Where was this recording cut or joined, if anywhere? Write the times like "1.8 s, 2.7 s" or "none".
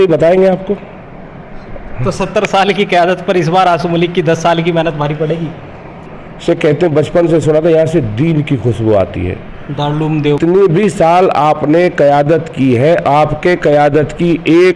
6.1 s, 10.4 s